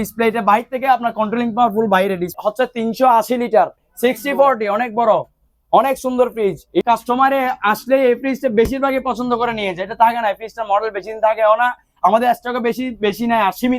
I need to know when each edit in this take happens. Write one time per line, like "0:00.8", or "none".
0:02.3
0:03.9
0:06.8